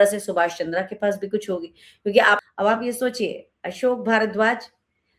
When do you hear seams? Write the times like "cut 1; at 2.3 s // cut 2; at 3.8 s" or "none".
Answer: cut 1; at 2.4 s